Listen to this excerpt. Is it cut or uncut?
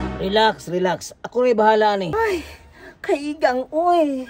cut